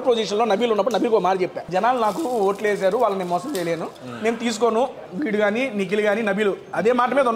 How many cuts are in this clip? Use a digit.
2